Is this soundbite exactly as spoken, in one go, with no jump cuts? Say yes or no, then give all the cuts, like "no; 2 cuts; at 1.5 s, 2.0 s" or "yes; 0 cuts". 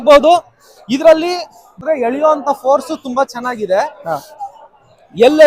no; 1 cut; at 1.7 s